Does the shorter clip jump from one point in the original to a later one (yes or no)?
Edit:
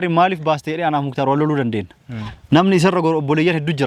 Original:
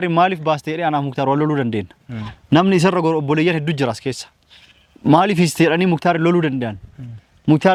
no